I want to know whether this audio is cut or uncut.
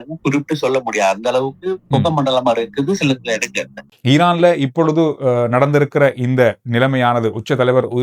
cut